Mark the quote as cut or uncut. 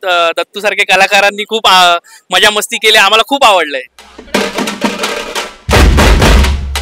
uncut